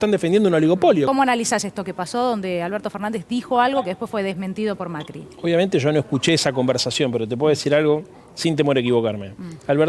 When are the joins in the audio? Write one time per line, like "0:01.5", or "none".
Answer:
0:01.1